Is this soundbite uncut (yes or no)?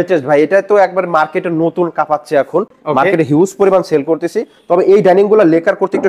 yes